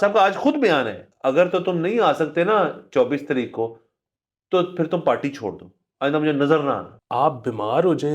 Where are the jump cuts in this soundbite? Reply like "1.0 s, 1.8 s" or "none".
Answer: 1.0 s, 6.9 s

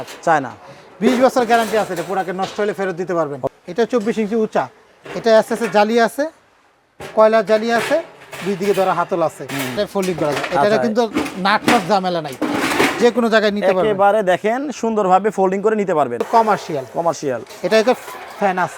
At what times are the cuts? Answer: 3.5 s, 9.7 s, 16.2 s

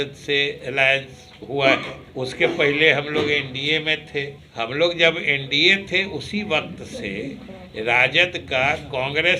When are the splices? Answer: 2.0 s, 4.4 s

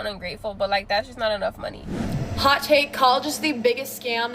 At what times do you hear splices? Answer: 2.0 s

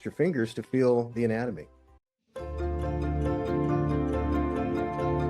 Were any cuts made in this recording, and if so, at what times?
2.1 s

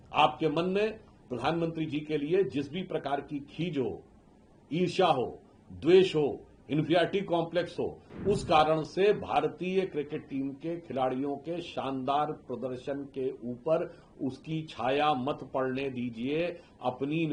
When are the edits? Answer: none

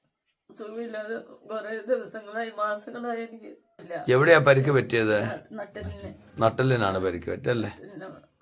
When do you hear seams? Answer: 3.8 s

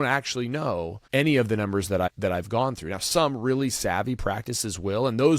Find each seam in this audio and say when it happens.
1.0 s, 2.1 s

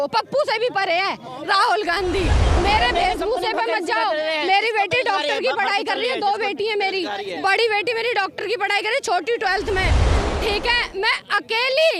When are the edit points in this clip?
2.5 s

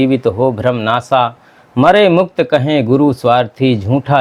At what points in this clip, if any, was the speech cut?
none

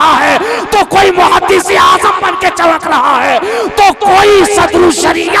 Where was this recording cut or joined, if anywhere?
none

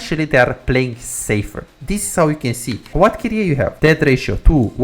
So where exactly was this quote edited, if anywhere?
2.7 s, 3.7 s

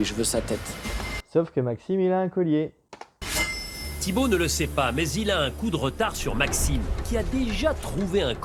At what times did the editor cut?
none

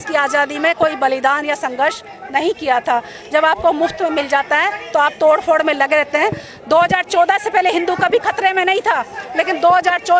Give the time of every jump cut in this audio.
none

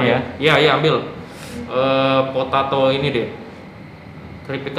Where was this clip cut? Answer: none

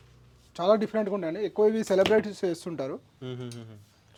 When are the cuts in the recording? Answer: none

